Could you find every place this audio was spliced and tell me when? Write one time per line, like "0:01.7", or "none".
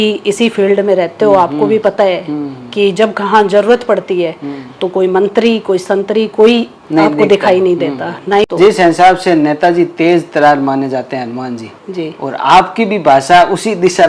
0:08.4